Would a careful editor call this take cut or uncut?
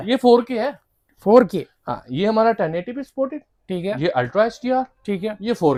uncut